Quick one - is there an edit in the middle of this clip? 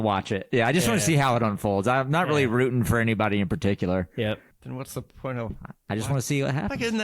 yes; 1 cut; at 4.5 s

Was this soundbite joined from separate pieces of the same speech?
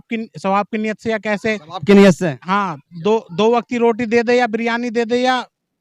no; 0 cuts

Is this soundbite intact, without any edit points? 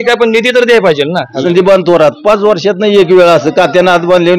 no; 1 cut; at 1.4 s

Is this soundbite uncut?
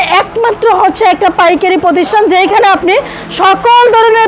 yes; 0 cuts

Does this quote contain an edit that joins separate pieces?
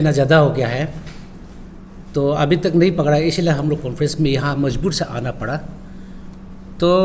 no; 0 cuts

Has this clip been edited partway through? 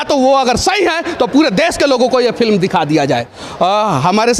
yes; 1 cut; at 3.4 s

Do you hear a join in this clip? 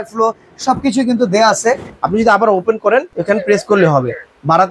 yes; 1 cut; at 1.9 s

